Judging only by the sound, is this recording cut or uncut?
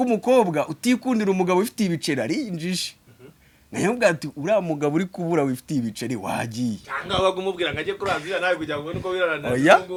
uncut